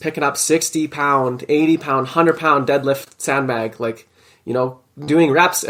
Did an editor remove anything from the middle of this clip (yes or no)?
no